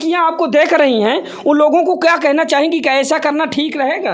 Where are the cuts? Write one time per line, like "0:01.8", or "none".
none